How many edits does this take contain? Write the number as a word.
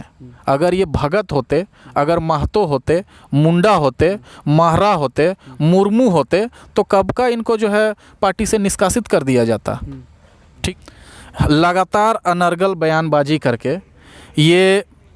one